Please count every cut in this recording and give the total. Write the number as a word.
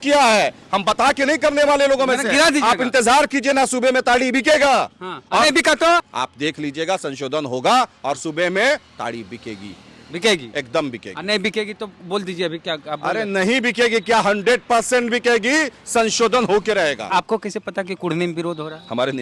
two